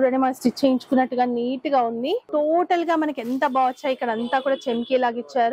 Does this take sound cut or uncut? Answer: cut